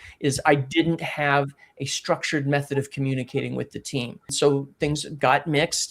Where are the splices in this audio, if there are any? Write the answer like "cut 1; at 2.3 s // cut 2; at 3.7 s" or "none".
cut 1; at 4.3 s